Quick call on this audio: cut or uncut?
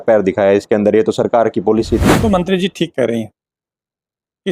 cut